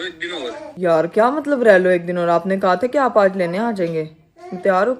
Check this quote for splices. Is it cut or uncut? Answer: uncut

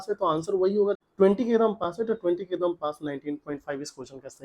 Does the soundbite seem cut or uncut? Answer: cut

